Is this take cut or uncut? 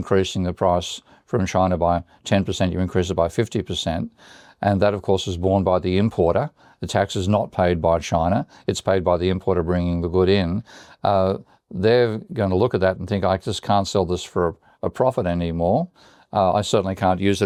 uncut